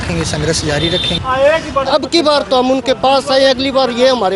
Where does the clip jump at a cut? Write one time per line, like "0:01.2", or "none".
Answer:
0:01.2